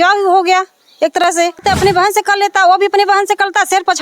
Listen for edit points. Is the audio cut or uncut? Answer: cut